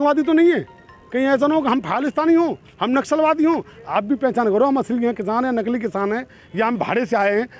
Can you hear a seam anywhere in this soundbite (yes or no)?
no